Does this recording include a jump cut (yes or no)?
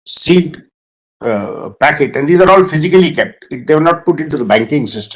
no